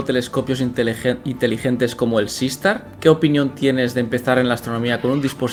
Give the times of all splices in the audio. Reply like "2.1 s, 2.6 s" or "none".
none